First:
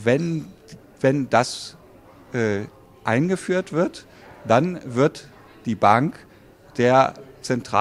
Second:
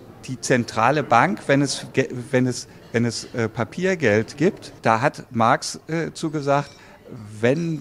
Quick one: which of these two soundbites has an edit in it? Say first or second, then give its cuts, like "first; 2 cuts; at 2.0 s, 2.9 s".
second; 1 cut; at 4.7 s